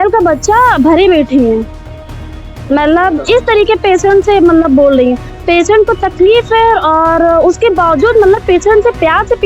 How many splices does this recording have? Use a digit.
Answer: 0